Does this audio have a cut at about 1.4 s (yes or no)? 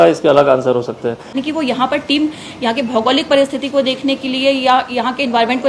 yes